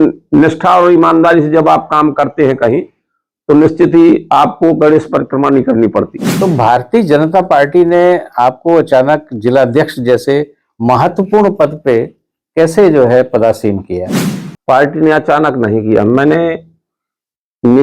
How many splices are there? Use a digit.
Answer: 1